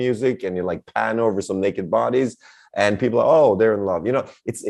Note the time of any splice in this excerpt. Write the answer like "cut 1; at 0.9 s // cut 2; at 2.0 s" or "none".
none